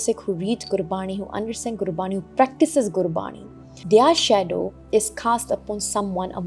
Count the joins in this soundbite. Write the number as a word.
one